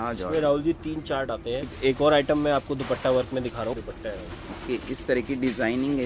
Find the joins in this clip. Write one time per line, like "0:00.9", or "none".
0:01.7
0:03.7

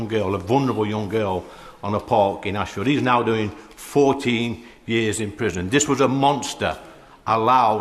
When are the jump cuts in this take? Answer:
none

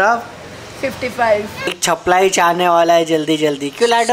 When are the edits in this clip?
0:01.7

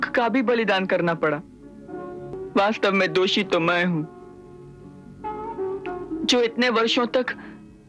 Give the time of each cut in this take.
0:02.4

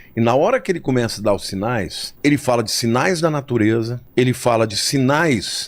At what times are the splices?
0:02.0
0:04.0

